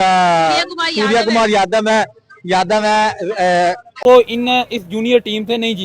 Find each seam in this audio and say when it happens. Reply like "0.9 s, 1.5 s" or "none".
4.0 s